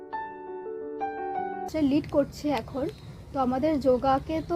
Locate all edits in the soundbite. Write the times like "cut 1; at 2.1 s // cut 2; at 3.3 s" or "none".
cut 1; at 1.7 s